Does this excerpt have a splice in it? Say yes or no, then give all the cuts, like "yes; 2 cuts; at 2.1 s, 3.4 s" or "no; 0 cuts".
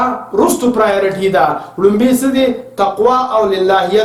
no; 0 cuts